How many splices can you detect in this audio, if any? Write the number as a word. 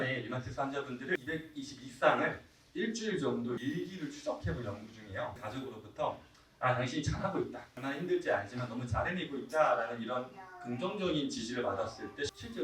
two